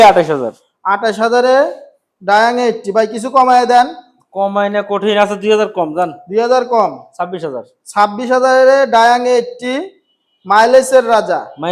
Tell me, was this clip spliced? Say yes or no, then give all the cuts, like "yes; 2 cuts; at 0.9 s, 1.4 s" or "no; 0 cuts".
no; 0 cuts